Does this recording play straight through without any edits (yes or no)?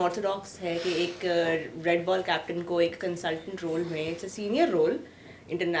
yes